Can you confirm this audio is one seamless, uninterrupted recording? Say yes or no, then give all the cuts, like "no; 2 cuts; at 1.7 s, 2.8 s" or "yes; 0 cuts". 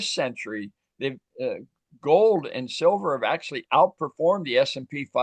yes; 0 cuts